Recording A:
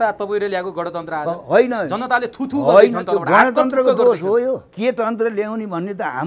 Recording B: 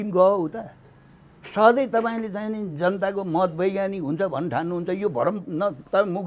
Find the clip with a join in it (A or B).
A